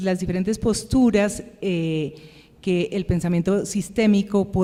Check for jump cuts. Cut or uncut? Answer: uncut